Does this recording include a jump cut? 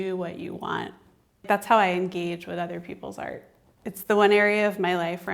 yes; 1 cut; at 1.4 s

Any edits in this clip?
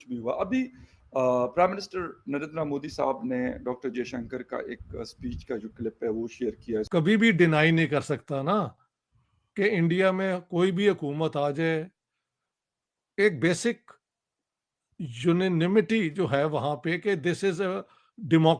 yes; 2 cuts; at 6.9 s, 14.0 s

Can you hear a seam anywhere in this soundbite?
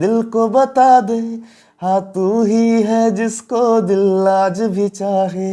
no; 0 cuts

